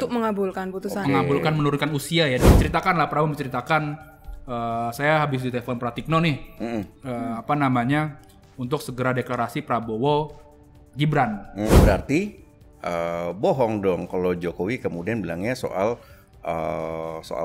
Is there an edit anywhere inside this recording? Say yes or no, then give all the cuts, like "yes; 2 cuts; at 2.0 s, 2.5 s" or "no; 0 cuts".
yes; 2 cuts; at 2.4 s, 11.7 s